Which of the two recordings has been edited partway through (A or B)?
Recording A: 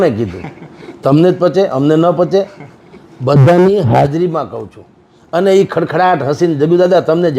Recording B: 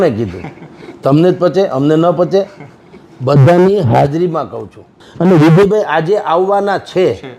B